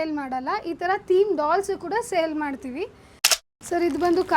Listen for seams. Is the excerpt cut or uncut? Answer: cut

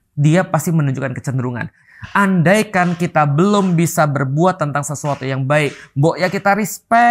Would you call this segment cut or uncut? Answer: cut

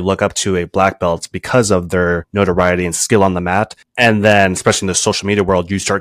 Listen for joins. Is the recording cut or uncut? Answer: cut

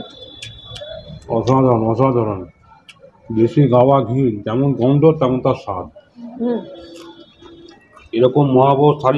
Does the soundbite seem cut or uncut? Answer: cut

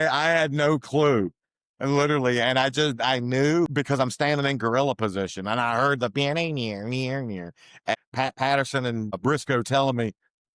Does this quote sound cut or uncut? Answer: cut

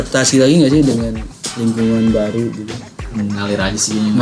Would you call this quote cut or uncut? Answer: cut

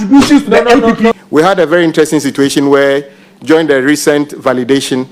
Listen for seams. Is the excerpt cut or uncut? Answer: cut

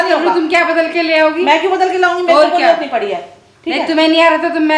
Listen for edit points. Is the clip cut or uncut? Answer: uncut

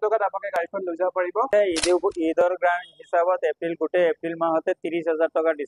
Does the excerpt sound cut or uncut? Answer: cut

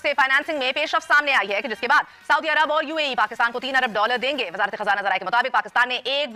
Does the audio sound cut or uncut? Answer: uncut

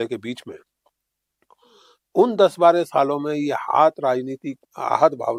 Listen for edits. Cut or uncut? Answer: uncut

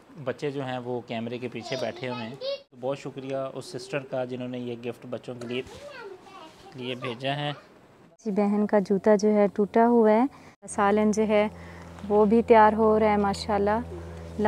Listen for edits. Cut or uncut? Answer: cut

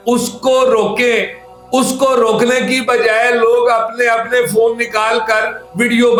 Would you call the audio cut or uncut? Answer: uncut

